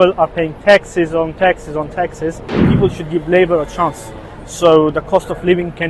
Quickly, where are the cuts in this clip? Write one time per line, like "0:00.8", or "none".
0:02.7